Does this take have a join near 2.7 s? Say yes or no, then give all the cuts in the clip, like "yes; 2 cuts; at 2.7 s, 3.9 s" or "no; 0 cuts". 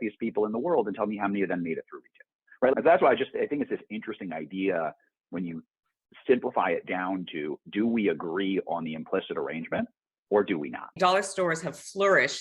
yes; 2 cuts; at 2.7 s, 10.9 s